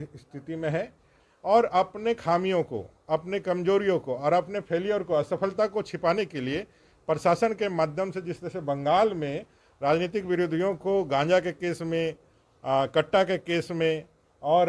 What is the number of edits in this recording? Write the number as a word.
one